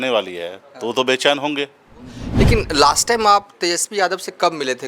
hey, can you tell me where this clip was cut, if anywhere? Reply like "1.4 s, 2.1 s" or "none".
2.2 s